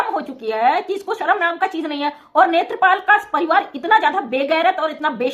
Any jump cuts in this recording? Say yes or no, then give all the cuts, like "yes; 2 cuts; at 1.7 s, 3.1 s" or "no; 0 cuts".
no; 0 cuts